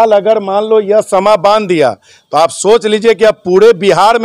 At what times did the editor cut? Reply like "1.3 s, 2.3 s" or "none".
none